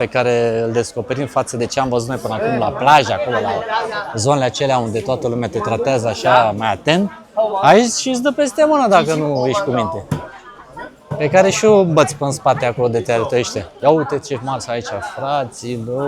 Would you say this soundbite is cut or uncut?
uncut